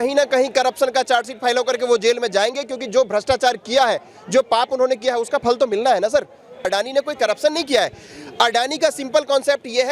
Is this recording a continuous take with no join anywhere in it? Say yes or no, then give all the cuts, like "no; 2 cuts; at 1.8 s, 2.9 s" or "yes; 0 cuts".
no; 1 cut; at 6.6 s